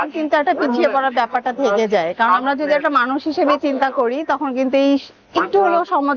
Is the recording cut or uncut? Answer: uncut